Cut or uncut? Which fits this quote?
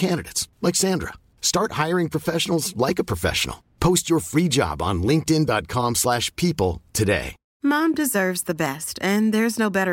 cut